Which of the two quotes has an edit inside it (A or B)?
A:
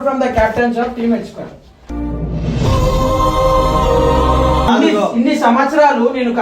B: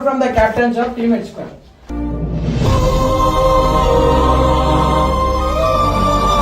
A